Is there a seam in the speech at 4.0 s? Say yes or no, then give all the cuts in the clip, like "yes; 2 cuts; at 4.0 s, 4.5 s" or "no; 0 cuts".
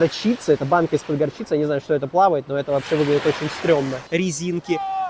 yes; 1 cut; at 4.0 s